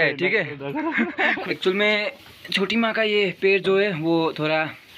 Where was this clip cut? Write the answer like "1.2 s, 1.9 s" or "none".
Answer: 1.4 s